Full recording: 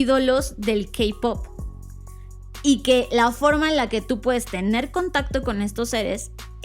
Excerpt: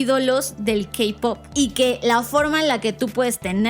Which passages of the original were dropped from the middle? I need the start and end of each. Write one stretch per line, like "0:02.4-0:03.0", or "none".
0:01.4-0:02.5